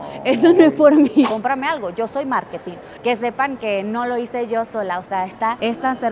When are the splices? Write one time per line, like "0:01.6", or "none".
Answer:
0:01.3
0:03.0